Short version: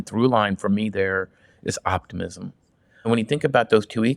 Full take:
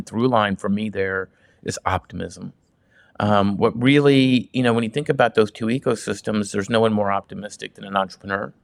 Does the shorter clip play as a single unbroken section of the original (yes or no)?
no